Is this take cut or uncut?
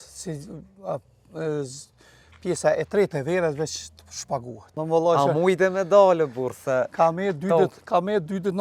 cut